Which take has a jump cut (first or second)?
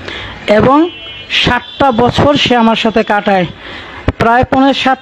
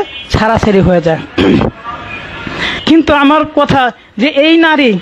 second